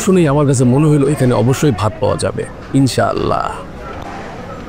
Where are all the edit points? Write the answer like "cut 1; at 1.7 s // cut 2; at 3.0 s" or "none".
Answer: none